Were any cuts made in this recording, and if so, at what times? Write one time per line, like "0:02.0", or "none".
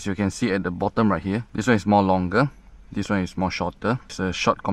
none